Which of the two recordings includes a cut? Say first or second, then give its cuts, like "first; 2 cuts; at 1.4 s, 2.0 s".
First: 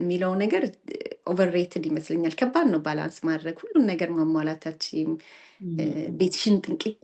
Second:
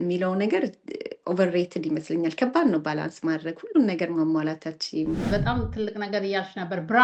second; 1 cut; at 5.2 s